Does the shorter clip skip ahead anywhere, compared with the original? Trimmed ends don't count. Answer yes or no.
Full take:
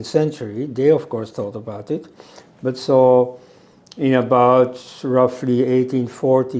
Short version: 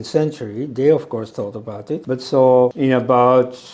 yes